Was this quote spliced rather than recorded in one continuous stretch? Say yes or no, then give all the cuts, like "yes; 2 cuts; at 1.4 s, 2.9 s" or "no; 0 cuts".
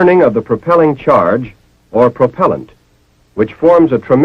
yes; 1 cut; at 1.2 s